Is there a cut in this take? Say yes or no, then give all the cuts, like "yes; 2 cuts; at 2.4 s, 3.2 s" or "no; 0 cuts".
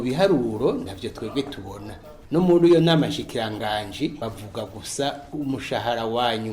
yes; 2 cuts; at 2.1 s, 4.2 s